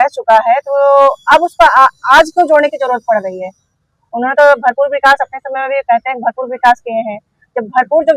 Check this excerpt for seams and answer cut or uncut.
uncut